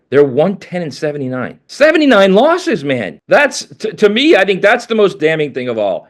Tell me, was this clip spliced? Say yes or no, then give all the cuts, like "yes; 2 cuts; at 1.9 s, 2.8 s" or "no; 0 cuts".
yes; 2 cuts; at 1.6 s, 3.1 s